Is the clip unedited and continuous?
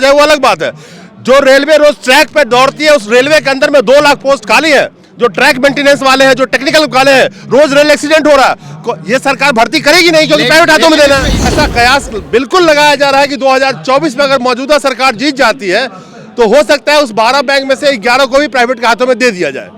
no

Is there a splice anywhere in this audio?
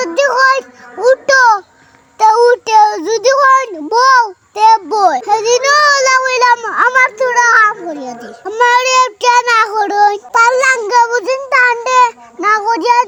no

